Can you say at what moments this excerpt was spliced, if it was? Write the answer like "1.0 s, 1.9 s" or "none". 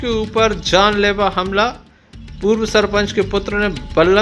none